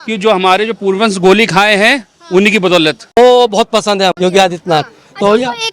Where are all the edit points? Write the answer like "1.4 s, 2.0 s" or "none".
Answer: 3.0 s, 4.2 s